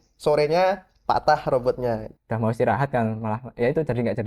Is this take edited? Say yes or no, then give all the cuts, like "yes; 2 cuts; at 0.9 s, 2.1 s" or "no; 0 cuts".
yes; 1 cut; at 2.2 s